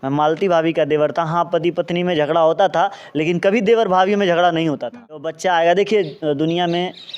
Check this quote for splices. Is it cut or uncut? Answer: cut